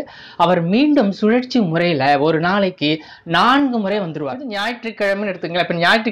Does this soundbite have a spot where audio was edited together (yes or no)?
yes